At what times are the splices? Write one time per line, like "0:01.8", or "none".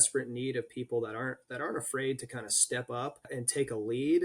0:03.3